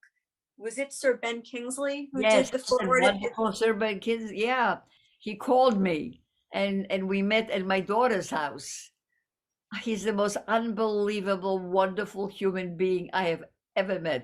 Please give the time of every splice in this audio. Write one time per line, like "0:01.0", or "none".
0:04.9